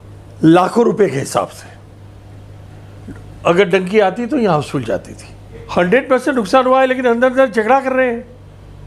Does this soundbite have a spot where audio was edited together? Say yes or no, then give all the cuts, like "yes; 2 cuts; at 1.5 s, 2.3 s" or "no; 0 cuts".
yes; 1 cut; at 5.6 s